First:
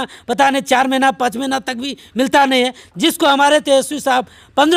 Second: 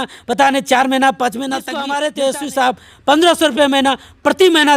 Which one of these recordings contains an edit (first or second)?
second